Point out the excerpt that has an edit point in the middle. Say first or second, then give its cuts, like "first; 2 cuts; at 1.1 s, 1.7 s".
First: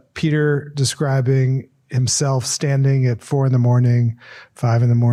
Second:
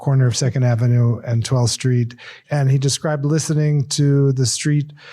second; 1 cut; at 2.3 s